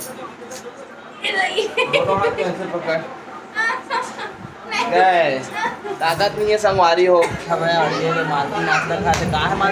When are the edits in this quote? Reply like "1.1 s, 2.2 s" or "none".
7.5 s